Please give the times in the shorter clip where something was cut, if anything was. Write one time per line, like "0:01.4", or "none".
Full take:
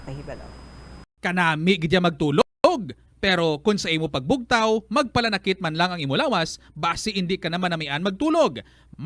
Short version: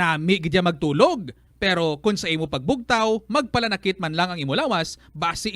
0:01.0